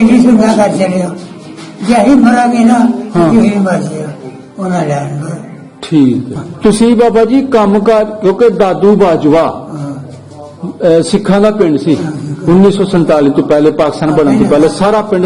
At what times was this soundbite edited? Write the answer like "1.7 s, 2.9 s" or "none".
6.4 s